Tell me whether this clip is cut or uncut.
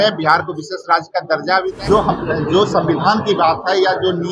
cut